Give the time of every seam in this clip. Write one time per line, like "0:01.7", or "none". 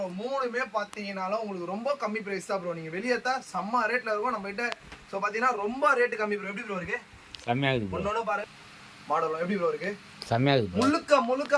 0:08.4

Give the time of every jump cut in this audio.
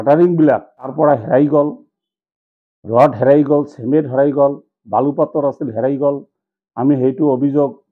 0:00.9

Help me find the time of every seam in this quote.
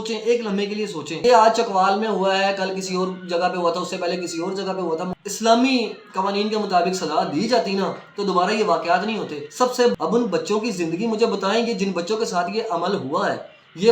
0:01.2
0:05.1
0:10.0

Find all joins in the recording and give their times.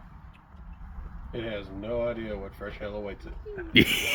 none

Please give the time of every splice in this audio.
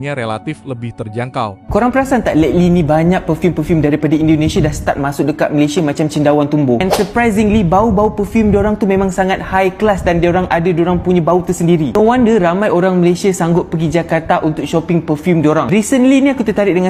none

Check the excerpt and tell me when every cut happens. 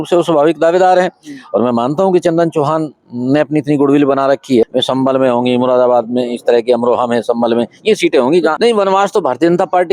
0:04.6
0:08.5

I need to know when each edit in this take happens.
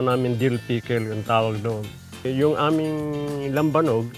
0:02.3

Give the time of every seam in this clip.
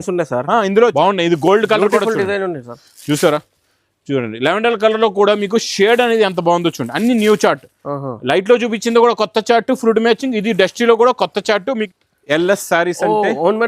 0:00.9
0:11.9

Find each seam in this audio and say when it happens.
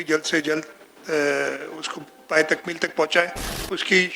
none

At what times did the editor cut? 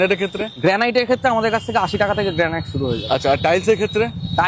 none

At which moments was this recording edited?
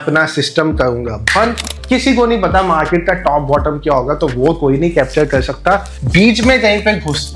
0:01.7

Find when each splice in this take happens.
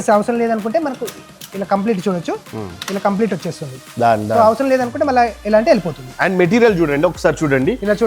0:06.1

